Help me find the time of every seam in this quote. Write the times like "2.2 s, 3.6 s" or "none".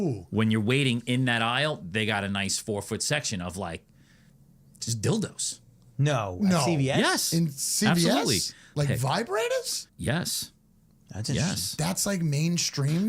8.7 s, 9.9 s